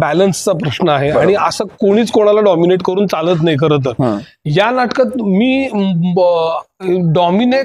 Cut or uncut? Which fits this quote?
uncut